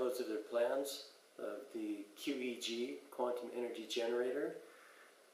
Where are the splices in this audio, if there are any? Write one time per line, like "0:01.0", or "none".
0:01.6